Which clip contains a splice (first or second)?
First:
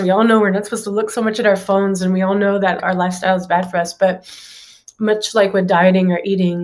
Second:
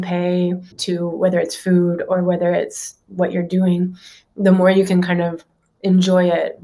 first